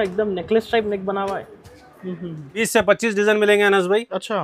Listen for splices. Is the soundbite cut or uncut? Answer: cut